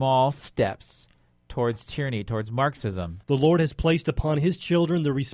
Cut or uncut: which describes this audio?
cut